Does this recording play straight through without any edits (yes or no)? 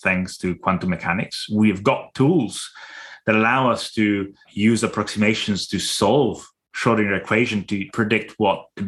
no